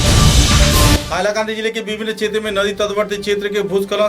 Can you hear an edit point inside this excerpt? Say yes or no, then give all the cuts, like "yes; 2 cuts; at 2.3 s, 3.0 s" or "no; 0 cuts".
no; 0 cuts